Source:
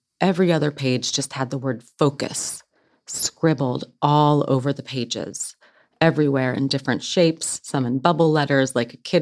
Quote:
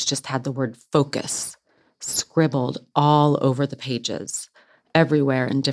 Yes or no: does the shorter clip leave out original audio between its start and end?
no